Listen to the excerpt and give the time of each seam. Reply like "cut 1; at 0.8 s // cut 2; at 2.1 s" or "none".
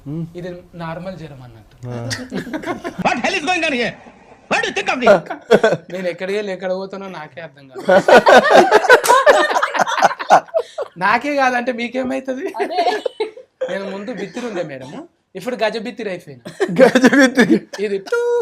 none